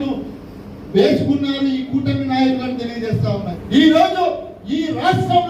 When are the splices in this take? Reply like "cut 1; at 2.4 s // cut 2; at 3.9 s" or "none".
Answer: cut 1; at 3.5 s